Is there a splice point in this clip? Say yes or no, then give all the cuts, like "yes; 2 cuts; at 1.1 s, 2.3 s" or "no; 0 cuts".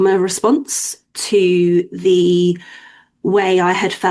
no; 0 cuts